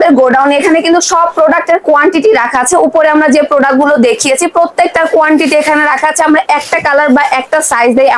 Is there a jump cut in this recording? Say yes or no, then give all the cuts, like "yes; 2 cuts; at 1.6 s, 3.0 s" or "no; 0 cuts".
no; 0 cuts